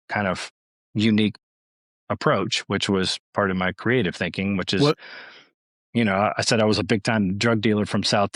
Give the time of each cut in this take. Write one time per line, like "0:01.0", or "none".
none